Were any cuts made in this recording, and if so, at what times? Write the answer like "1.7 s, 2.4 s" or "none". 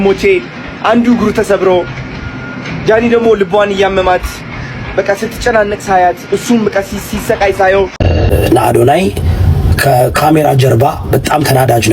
8.1 s